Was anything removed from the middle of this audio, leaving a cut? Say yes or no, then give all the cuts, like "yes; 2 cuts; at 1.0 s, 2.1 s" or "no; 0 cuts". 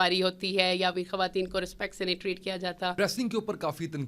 yes; 1 cut; at 2.9 s